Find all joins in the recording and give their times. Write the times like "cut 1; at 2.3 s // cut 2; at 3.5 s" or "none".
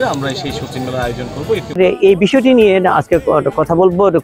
cut 1; at 1.8 s